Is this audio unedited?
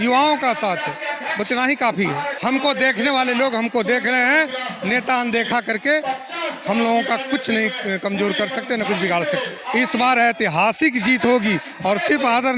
no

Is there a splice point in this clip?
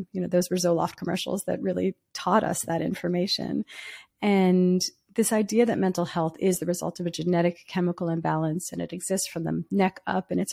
no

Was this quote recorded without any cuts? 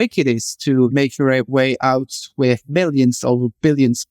no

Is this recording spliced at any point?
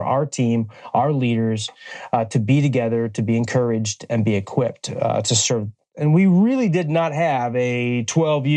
yes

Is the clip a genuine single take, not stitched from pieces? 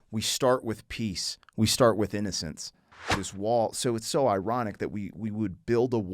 no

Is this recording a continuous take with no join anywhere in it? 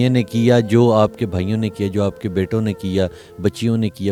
yes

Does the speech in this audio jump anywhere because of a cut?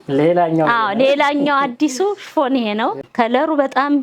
yes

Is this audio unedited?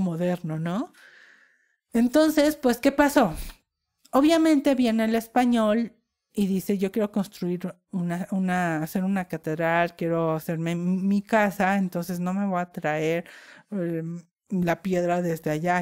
yes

